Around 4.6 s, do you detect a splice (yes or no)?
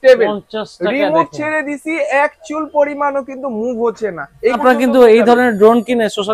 yes